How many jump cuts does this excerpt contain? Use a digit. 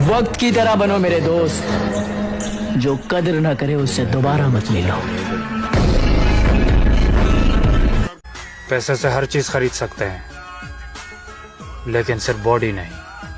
1